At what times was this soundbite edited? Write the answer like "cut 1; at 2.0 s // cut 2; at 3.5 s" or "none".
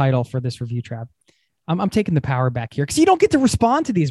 none